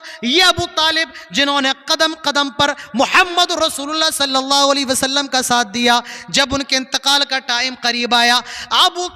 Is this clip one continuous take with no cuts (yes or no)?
yes